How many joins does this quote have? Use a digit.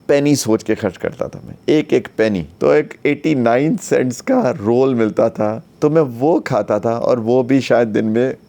2